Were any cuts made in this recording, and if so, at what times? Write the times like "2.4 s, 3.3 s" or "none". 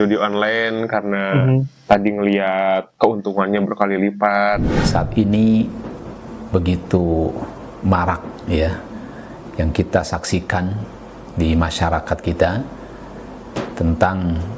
4.8 s